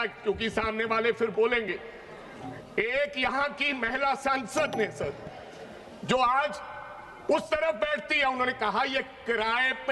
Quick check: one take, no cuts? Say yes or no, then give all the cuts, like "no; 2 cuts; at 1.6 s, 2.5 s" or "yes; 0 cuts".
yes; 0 cuts